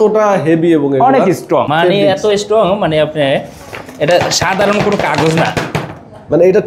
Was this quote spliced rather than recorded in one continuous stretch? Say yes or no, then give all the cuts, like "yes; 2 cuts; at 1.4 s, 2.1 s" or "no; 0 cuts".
yes; 1 cut; at 1.7 s